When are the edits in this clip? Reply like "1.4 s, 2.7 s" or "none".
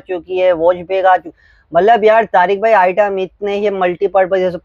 none